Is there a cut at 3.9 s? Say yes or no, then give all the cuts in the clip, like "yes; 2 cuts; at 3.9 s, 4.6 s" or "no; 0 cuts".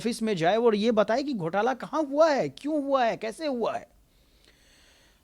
no; 0 cuts